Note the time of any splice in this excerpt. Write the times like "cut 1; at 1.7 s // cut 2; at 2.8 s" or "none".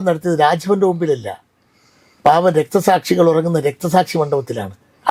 none